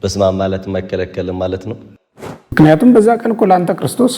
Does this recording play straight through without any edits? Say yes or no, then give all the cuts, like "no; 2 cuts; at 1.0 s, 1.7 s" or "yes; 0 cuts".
no; 1 cut; at 2.0 s